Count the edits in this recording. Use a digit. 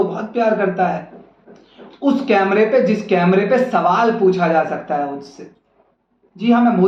0